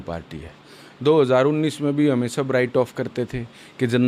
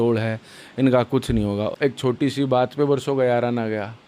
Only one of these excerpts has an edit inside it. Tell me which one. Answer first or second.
second